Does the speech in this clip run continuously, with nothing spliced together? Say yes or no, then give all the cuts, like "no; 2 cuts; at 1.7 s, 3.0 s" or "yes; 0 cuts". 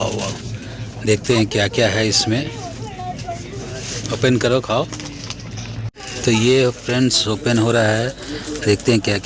yes; 0 cuts